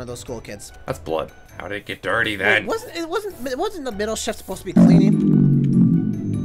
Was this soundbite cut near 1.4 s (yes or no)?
yes